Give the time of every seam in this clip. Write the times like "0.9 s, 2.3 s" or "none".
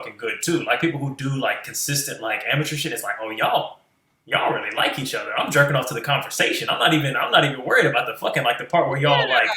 none